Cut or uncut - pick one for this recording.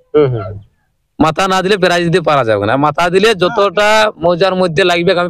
uncut